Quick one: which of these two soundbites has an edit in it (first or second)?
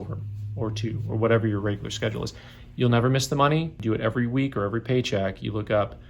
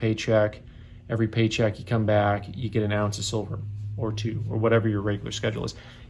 first